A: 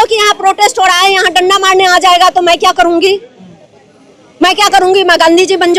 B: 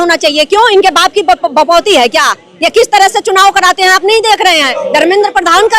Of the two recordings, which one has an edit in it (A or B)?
B